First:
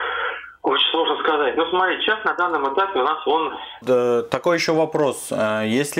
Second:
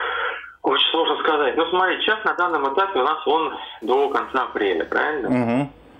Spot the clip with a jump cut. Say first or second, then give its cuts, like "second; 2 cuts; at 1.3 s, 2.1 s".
first; 1 cut; at 3.8 s